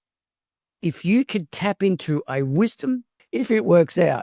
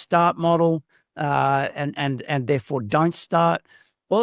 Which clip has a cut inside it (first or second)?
first